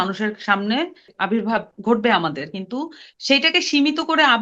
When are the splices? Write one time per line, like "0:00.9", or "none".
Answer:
0:01.1